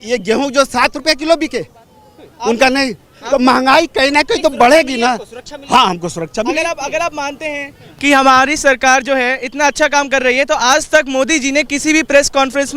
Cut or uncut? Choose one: uncut